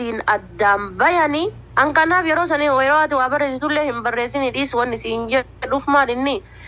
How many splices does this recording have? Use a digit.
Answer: 1